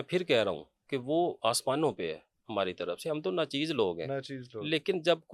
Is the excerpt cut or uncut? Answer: uncut